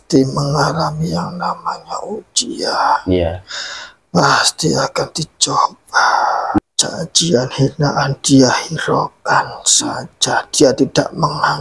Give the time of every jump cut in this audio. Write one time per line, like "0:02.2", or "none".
0:06.6

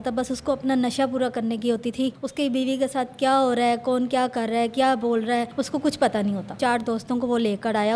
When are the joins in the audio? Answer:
0:02.2
0:05.5
0:06.6

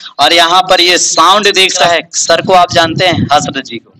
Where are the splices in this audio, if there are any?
0:01.8

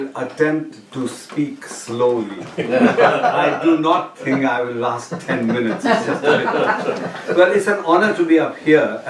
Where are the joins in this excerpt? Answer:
none

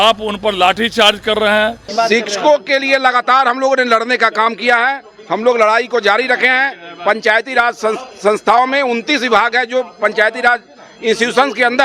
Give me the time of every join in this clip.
0:01.9

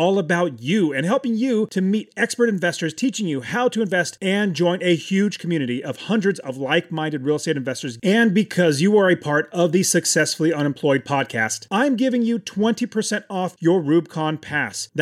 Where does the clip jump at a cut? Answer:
none

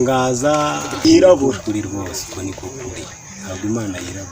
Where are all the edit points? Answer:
0:01.0

